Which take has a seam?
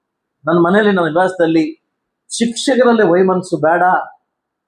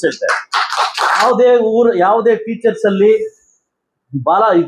second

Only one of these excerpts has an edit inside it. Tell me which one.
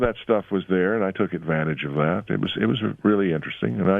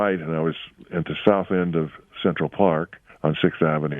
second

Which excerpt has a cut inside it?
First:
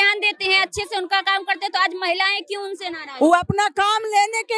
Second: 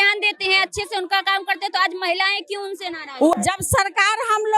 second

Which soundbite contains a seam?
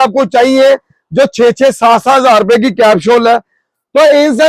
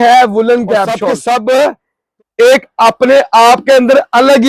second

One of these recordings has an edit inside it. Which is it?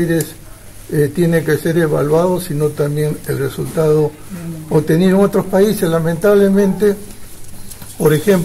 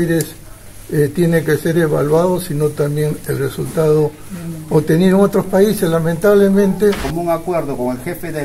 second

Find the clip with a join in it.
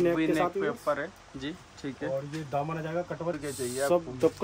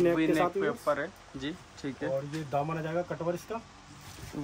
first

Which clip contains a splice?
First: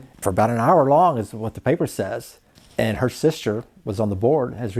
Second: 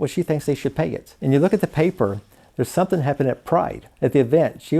second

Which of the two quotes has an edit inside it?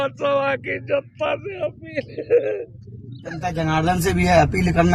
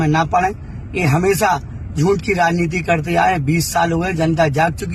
first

